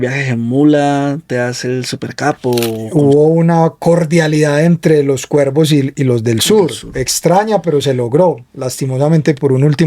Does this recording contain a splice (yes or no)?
yes